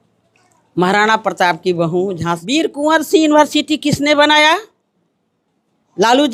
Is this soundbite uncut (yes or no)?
no